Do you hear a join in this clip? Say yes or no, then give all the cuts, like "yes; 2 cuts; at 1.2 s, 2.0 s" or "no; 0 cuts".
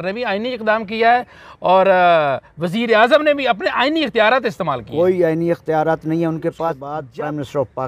yes; 1 cut; at 6.9 s